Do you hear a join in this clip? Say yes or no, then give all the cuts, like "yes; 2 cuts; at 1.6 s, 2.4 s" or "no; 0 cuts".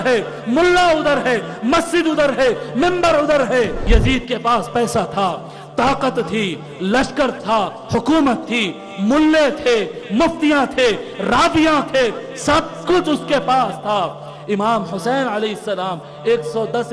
yes; 1 cut; at 3.8 s